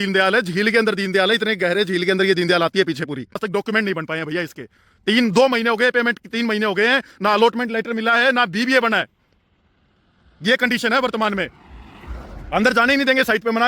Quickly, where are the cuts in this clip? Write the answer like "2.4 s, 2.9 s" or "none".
3.4 s